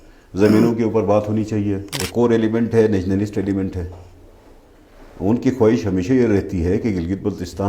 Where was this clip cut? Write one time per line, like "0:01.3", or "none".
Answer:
0:01.9

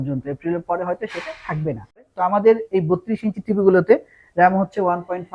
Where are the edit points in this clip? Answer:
0:01.9

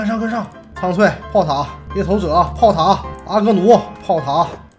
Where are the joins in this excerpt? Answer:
none

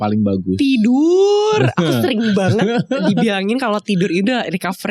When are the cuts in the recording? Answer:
none

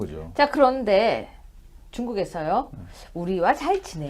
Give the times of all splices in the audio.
0:01.5

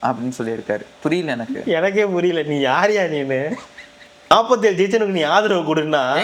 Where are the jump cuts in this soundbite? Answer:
0:04.3

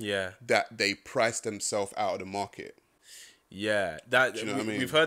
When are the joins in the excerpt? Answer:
none

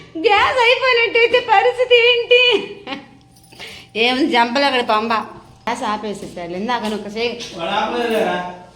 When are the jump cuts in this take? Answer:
0:05.7

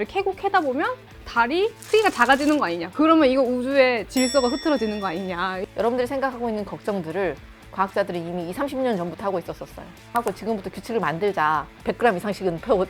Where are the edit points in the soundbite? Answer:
0:05.6
0:10.1

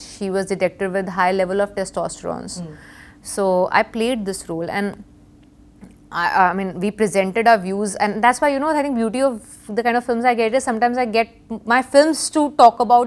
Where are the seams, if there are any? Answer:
none

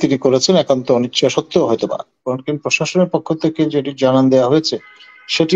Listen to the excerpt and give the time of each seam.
0:02.3

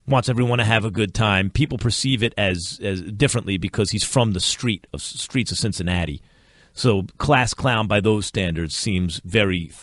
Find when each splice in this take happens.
0:01.4

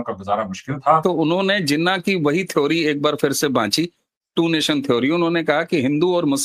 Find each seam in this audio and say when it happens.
0:01.0

